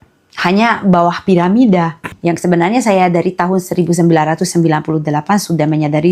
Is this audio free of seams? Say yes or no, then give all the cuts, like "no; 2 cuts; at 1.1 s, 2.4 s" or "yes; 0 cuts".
no; 1 cut; at 2.1 s